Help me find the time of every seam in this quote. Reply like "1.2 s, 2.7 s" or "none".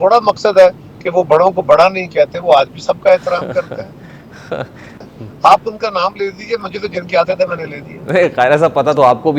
4.9 s